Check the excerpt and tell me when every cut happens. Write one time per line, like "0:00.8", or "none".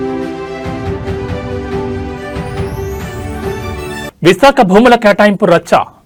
none